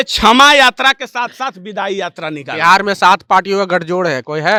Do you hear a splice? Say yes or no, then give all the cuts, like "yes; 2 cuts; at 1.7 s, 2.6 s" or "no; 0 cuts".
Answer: no; 0 cuts